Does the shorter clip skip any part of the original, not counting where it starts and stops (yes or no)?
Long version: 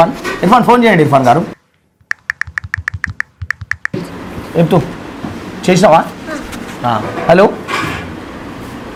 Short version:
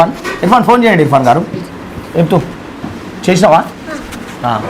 yes